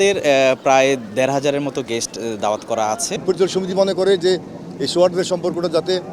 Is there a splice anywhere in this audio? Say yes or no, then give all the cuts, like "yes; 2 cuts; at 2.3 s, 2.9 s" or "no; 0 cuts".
yes; 1 cut; at 3.2 s